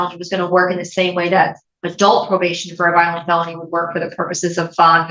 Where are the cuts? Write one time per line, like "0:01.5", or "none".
none